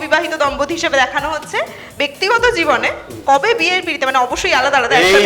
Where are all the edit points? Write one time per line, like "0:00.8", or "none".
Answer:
none